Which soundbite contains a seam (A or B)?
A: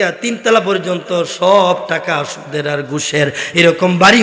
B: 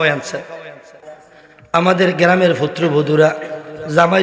B